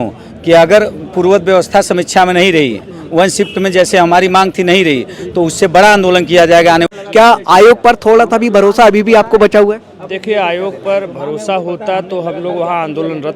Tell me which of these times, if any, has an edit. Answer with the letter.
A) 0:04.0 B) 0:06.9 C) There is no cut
B